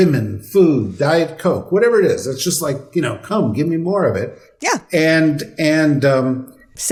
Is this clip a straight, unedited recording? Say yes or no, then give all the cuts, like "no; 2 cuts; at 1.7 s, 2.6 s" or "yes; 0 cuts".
yes; 0 cuts